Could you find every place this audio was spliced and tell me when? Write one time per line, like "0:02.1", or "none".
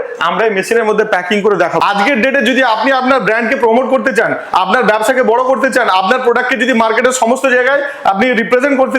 0:01.8